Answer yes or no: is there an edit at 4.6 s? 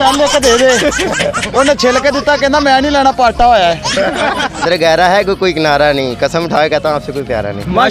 yes